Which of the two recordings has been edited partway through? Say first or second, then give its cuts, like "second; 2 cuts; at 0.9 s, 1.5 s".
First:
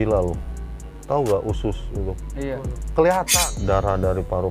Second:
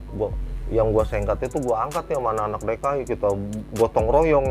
first; 1 cut; at 3.3 s